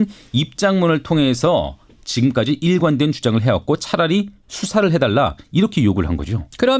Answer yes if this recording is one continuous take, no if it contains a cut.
yes